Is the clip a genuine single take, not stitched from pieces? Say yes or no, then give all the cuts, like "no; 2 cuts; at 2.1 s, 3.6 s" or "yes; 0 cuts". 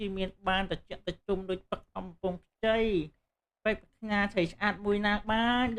yes; 0 cuts